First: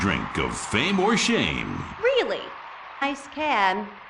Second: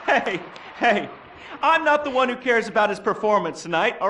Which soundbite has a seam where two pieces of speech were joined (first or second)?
first